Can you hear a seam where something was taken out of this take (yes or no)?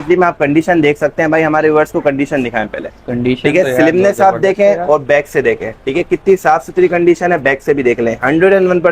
no